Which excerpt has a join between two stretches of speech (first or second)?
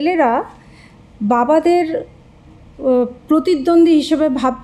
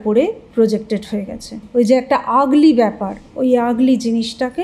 second